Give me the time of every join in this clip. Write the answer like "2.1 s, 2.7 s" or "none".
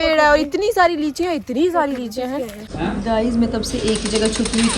2.6 s